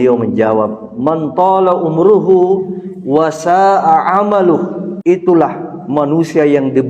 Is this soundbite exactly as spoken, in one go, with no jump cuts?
no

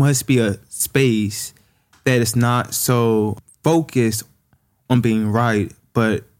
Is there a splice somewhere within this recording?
yes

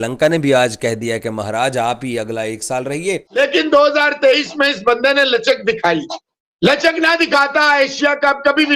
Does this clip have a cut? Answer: yes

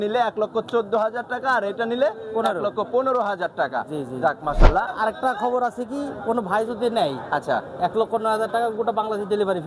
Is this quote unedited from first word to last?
no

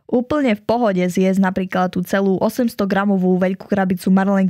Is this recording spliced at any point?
no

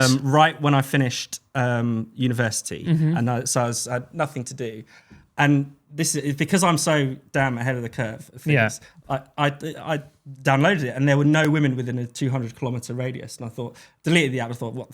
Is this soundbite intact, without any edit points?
yes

